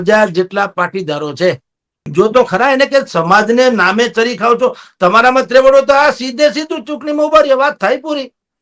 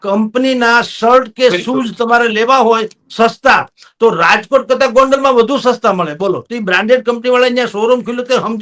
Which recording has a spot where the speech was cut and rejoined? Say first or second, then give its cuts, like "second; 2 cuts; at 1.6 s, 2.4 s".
first; 1 cut; at 2.0 s